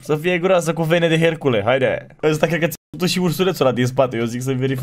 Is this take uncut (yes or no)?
no